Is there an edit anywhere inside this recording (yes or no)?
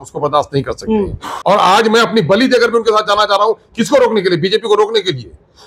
yes